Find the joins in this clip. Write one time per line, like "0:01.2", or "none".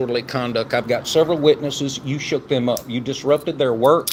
none